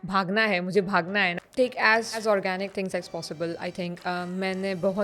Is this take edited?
yes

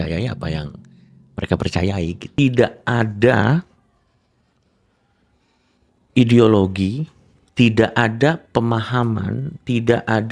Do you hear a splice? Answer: yes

